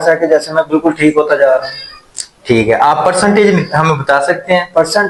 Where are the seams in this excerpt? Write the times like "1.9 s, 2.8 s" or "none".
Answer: none